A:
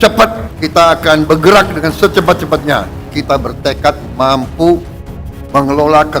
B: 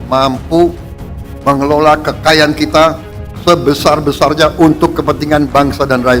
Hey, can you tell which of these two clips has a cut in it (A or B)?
A